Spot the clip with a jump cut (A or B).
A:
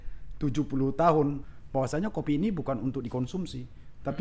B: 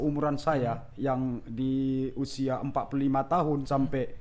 A